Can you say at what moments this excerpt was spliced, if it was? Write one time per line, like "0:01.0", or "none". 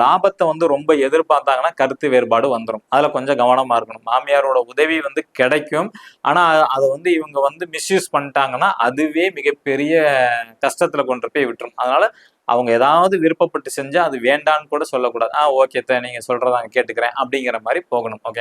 none